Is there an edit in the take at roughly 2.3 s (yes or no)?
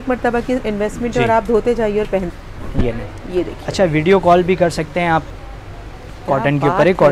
yes